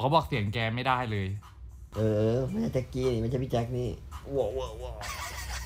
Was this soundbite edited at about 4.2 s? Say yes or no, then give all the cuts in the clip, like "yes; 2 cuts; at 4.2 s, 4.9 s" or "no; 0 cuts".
no; 1 cut; at 1.9 s